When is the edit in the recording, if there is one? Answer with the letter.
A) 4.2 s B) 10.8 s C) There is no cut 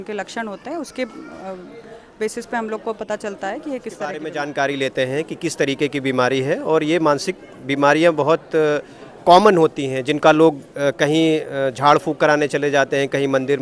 A